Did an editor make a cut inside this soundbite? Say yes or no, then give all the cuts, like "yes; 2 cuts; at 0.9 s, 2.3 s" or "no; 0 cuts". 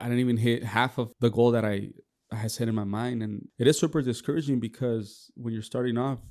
yes; 2 cuts; at 1.1 s, 3.4 s